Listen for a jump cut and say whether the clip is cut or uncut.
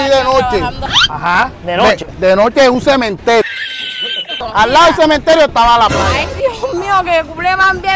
uncut